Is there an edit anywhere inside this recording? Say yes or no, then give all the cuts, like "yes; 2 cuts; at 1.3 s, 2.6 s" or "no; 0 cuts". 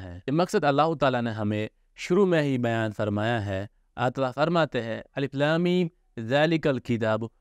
no; 0 cuts